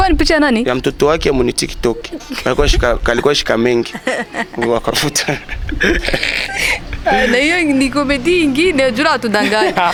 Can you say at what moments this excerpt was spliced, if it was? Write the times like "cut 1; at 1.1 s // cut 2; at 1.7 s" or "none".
none

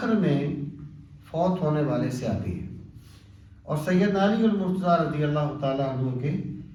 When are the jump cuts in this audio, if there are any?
none

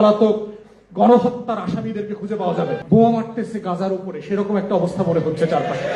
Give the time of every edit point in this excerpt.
cut 1; at 2.8 s

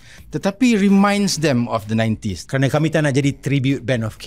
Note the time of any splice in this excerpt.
cut 1; at 2.3 s

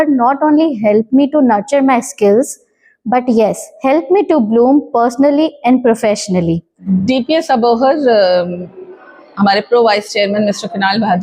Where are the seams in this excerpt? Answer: cut 1; at 6.8 s

